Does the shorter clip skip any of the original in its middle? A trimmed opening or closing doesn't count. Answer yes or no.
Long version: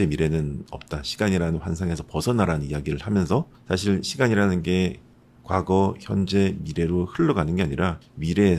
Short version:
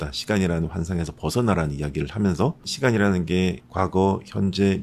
yes